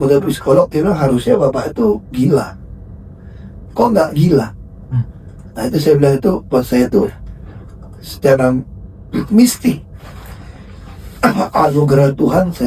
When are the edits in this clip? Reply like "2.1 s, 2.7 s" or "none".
none